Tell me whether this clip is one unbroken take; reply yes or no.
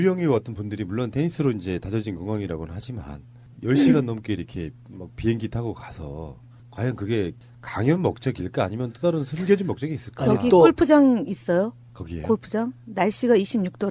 yes